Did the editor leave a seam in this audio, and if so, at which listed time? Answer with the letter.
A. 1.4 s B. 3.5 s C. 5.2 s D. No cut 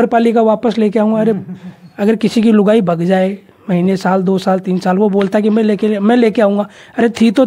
A